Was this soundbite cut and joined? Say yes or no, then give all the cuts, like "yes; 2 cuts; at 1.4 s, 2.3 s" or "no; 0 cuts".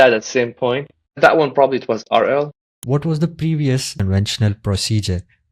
yes; 2 cuts; at 2.8 s, 3.9 s